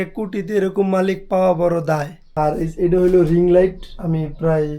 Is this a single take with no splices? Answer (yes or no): no